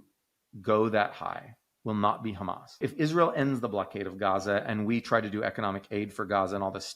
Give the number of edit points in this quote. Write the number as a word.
one